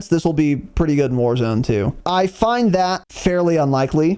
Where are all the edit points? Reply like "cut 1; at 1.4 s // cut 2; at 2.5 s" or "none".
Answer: cut 1; at 2.0 s // cut 2; at 3.1 s